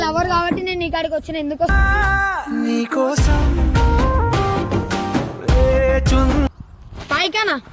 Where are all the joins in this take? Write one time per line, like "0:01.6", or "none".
0:01.7
0:06.5